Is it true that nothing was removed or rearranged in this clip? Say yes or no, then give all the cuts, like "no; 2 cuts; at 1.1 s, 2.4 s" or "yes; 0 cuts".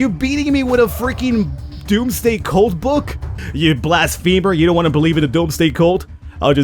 no; 1 cut; at 3.4 s